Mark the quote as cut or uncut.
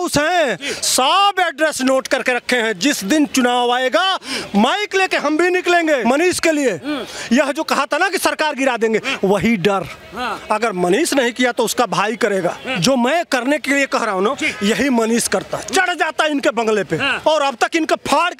cut